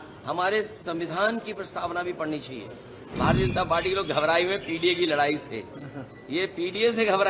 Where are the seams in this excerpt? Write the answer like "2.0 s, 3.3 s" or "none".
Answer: 3.0 s